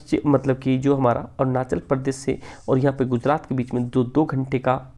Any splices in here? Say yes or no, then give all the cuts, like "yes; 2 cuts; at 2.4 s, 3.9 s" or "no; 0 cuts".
no; 0 cuts